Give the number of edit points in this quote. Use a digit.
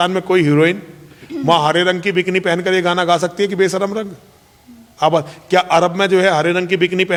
0